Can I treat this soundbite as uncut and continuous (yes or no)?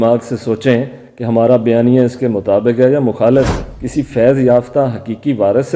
no